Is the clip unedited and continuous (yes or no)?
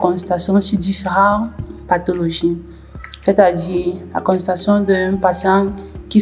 yes